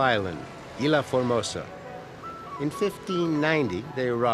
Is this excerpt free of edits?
yes; 0 cuts

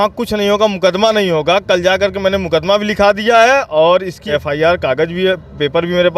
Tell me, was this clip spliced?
yes; 1 cut; at 4.2 s

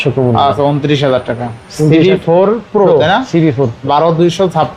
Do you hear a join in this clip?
no; 0 cuts

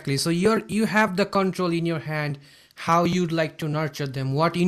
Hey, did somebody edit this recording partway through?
no; 0 cuts

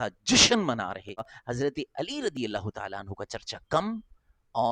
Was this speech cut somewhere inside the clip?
yes; 1 cut; at 1.3 s

